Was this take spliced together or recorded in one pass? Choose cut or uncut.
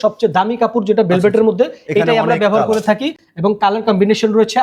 uncut